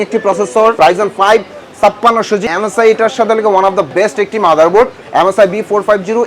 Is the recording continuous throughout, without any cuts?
no; 3 cuts; at 0.8 s, 2.4 s, 5.0 s

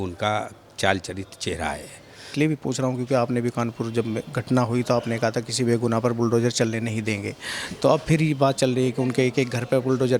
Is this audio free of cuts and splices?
no; 1 cut; at 2.3 s

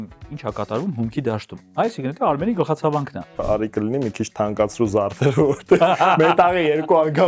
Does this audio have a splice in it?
yes; 2 cuts; at 1.6 s, 3.4 s

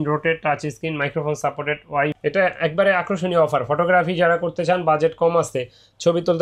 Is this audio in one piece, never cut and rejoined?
no; 1 cut; at 2.2 s

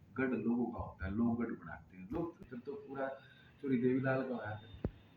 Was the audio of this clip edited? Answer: yes; 1 cut; at 2.4 s

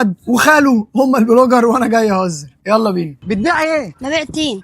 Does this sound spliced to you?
yes; 1 cut; at 3.2 s

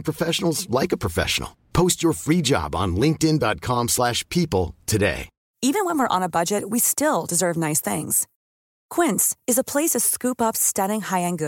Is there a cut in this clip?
yes; 1 cut; at 5.5 s

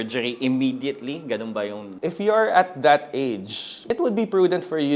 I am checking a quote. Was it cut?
yes; 2 cuts; at 1.9 s, 3.8 s

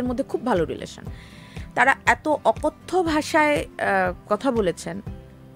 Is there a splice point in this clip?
no; 0 cuts

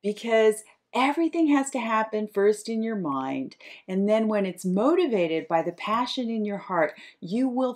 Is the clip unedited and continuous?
yes; 0 cuts

